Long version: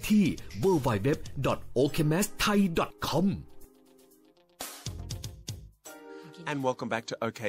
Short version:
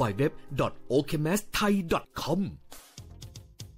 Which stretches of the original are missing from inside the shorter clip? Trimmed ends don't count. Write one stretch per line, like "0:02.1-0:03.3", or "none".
0:03.5-0:04.5